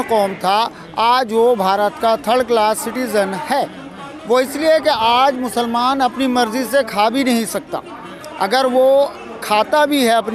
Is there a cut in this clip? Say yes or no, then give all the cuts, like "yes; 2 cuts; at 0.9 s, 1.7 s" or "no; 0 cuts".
no; 0 cuts